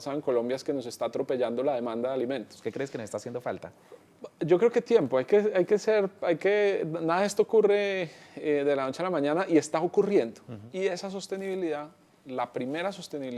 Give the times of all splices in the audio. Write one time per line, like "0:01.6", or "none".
0:02.5
0:10.7